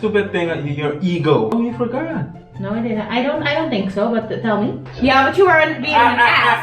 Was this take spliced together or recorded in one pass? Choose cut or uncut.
cut